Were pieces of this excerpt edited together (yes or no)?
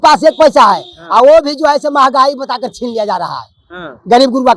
no